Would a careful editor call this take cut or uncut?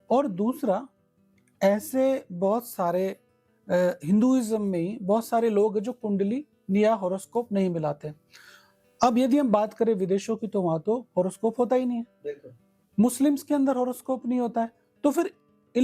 uncut